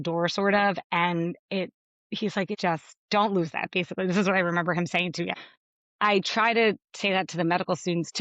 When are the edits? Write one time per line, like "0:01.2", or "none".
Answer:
0:02.7
0:05.3